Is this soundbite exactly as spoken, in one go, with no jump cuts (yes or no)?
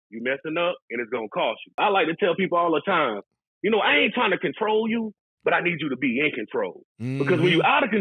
no